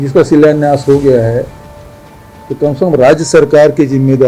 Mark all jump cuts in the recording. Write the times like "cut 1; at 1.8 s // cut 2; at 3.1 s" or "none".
none

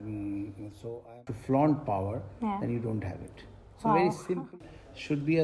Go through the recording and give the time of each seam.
cut 1; at 1.2 s // cut 2; at 4.5 s

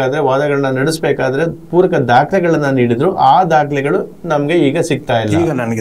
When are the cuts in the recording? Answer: none

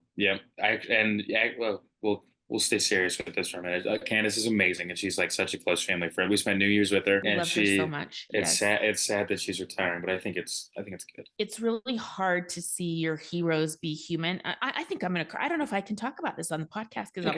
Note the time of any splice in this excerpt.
cut 1; at 7.2 s // cut 2; at 11.2 s

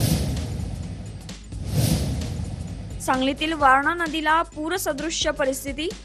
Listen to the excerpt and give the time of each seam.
none

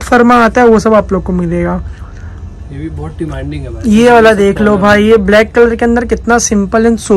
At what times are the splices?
none

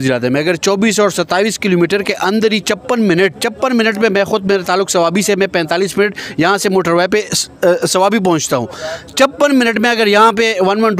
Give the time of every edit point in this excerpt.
none

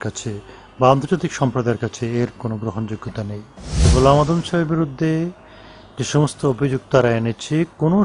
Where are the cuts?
cut 1; at 3.8 s

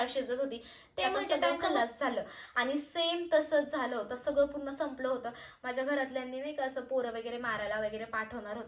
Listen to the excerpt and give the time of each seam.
cut 1; at 1.3 s

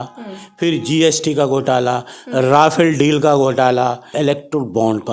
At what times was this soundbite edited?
cut 1; at 4.1 s

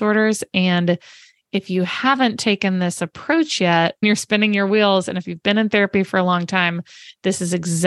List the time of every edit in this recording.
cut 1; at 4.0 s

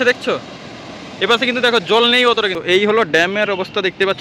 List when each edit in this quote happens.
cut 1; at 2.5 s

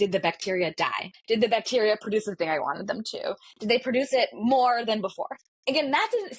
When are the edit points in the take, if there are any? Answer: cut 1; at 1.2 s

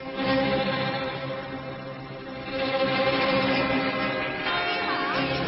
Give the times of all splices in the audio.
none

